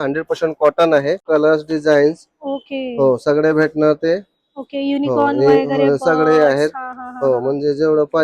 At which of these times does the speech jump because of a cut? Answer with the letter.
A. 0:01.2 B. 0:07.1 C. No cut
A